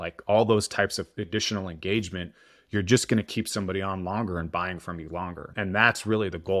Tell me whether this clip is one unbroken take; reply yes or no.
no